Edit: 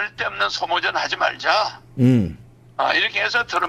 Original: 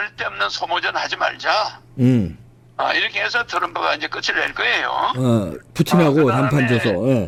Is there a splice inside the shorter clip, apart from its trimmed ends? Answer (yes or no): no